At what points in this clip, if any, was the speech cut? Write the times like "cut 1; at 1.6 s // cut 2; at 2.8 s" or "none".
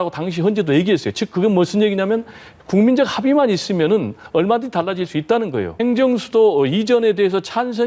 cut 1; at 5.7 s